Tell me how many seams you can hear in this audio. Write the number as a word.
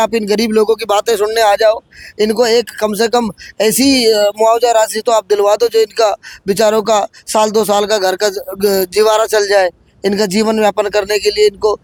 zero